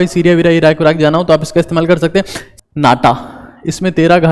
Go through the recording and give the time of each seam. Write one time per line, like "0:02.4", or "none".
0:02.4